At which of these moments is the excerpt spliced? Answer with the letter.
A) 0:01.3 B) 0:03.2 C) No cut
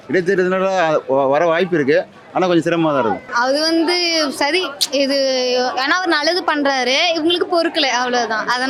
C